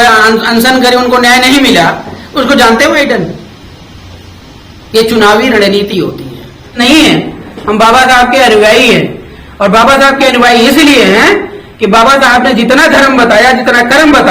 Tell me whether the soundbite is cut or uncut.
cut